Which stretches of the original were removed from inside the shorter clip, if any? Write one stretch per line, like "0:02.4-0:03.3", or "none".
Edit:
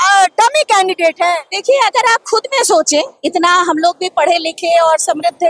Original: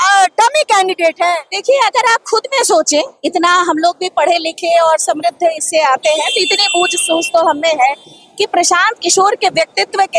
none